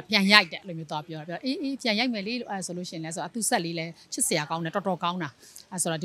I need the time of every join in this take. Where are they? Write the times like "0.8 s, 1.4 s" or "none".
none